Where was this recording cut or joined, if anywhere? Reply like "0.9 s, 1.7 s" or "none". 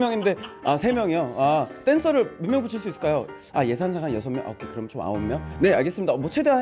none